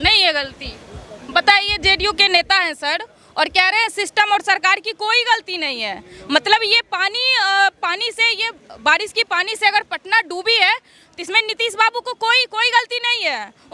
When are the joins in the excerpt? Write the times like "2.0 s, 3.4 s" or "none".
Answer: none